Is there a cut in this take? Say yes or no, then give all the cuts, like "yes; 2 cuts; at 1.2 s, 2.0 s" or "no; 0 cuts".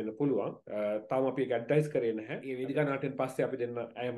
yes; 1 cut; at 2.5 s